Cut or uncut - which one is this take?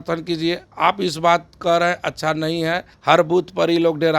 cut